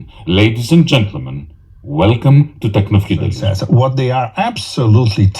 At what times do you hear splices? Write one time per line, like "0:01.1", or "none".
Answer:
0:03.4